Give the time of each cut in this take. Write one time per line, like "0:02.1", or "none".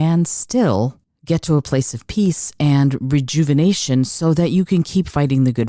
none